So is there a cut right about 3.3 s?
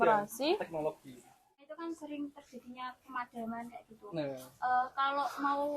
no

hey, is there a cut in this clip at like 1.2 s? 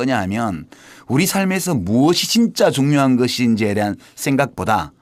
no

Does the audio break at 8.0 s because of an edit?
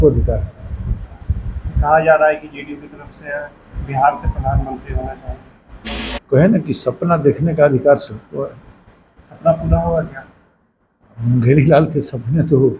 no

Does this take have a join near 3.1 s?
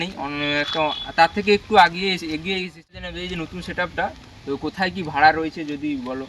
yes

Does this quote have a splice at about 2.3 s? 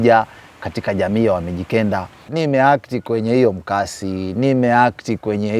yes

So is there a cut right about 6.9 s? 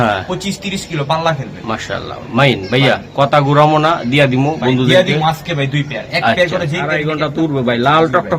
yes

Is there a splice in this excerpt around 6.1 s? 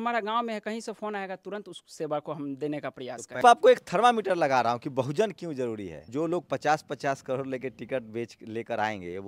yes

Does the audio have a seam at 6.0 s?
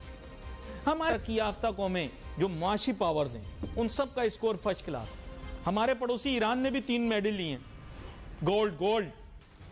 no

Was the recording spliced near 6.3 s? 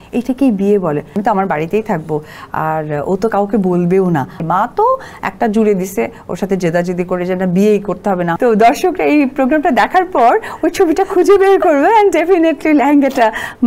no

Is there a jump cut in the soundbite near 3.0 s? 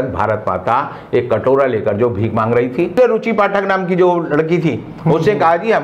yes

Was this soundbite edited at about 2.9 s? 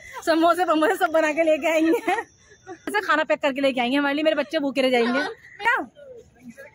yes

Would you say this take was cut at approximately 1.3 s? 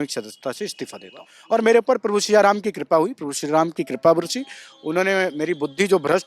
yes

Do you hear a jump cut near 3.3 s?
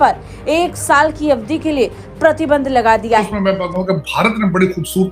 yes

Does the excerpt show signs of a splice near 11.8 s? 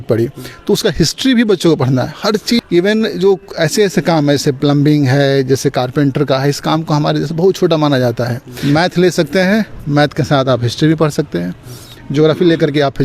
no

